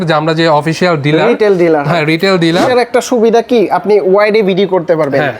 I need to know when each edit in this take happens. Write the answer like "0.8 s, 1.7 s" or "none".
2.7 s